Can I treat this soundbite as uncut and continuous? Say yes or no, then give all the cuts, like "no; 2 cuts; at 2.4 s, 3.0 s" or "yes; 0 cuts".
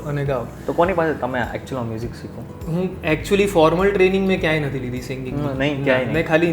yes; 0 cuts